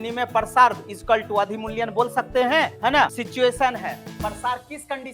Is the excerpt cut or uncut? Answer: cut